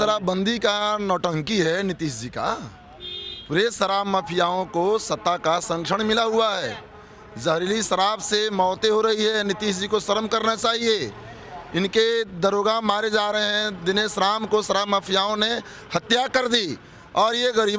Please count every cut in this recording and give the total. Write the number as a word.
zero